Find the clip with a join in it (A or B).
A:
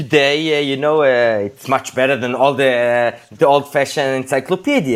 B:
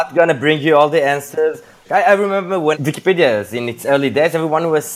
B